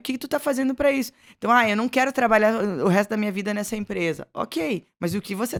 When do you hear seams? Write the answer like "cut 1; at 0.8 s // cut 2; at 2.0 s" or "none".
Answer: none